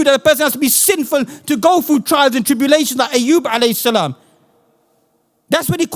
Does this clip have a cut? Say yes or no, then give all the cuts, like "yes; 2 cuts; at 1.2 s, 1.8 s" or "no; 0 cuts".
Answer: no; 0 cuts